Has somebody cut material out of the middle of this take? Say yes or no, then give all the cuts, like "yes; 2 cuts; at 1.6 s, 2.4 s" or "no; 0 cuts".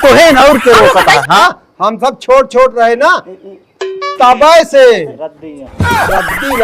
yes; 1 cut; at 1.4 s